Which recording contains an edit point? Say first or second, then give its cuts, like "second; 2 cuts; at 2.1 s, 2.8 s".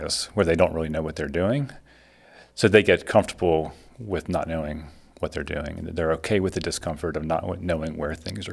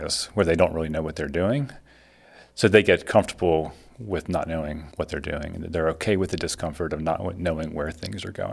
second; 1 cut; at 4.8 s